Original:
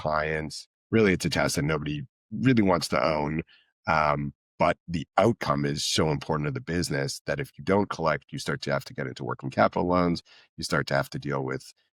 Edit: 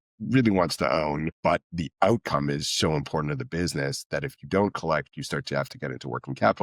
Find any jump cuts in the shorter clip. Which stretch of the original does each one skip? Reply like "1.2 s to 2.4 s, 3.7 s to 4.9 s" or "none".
3.4 s to 4.5 s